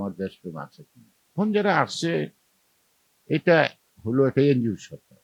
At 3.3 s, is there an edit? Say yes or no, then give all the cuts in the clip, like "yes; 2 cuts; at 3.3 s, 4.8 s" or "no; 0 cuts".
no; 1 cut; at 1.3 s